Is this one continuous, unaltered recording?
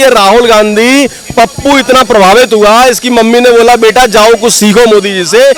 yes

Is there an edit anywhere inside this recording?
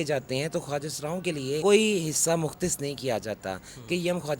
yes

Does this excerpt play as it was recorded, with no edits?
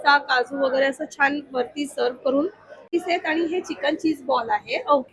no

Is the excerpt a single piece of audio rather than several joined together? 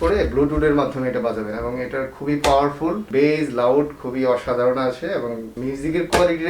no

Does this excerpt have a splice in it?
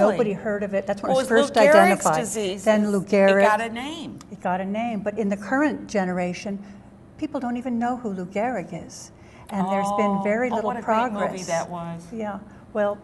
yes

